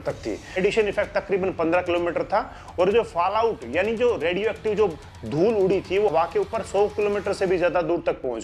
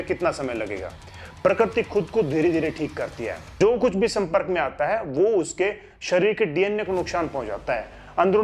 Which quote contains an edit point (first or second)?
second